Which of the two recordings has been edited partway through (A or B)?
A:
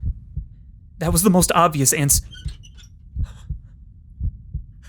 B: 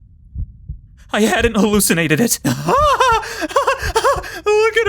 B